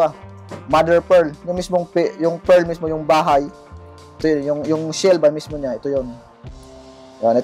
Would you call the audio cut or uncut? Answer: uncut